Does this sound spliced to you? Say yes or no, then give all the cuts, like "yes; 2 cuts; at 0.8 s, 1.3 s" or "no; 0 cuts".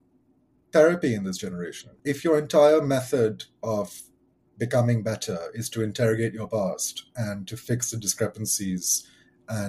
no; 0 cuts